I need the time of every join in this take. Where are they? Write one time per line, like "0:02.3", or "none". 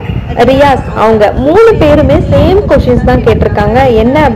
none

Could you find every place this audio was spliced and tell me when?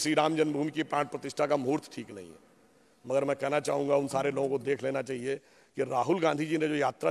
none

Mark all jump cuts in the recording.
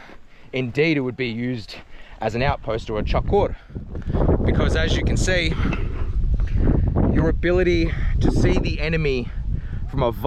none

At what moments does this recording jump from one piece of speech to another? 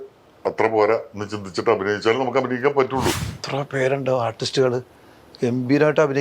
0:03.3

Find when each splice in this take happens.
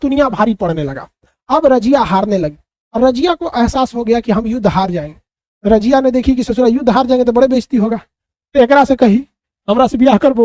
none

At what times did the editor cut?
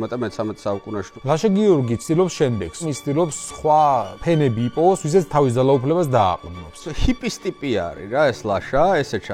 0:01.1
0:02.9
0:04.1
0:06.9

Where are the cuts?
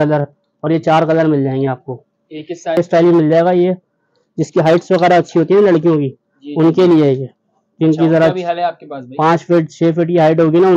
0:02.8

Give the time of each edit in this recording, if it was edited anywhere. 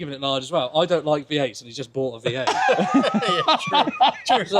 none

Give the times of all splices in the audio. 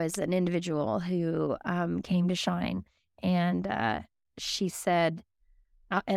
none

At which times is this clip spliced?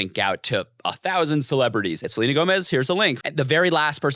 0:02.1
0:03.2

